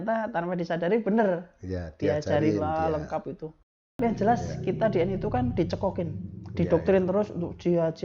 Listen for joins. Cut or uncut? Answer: cut